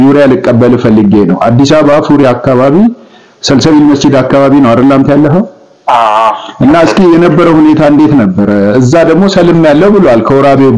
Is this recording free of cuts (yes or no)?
yes